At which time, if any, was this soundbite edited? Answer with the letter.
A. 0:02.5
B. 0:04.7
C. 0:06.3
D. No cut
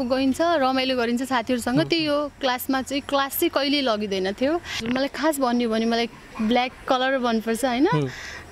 B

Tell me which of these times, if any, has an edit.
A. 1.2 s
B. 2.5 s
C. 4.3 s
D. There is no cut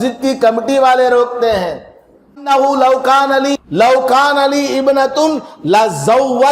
B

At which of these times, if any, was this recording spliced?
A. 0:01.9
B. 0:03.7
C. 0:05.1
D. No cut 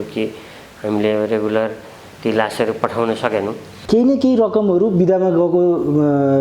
B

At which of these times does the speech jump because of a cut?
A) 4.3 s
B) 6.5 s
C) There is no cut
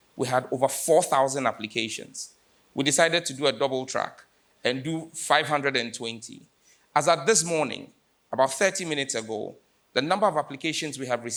C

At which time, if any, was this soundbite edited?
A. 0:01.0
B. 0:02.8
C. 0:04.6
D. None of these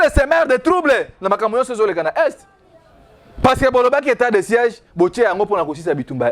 D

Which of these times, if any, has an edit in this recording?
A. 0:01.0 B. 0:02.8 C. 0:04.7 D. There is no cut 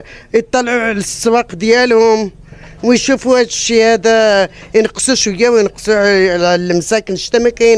D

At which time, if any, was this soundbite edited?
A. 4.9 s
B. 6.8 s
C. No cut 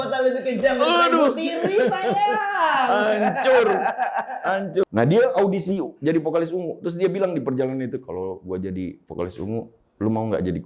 A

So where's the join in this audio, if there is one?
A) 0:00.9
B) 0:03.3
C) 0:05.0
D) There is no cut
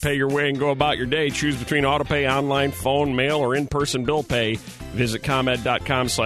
D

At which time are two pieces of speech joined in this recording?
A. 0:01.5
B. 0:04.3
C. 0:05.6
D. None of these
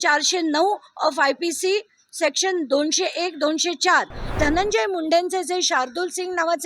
B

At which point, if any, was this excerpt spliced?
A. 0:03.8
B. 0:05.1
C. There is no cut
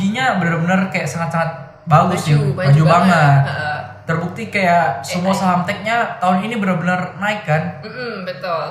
C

